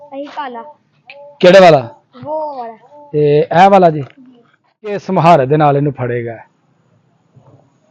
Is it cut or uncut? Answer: cut